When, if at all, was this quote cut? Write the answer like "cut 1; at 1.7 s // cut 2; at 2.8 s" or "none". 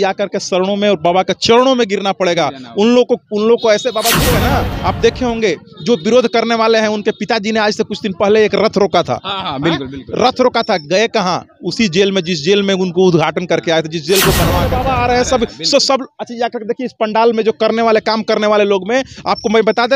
cut 1; at 4.3 s // cut 2; at 14.7 s